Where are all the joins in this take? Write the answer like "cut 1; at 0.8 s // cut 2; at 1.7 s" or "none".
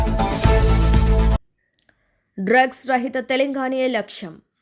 cut 1; at 1.4 s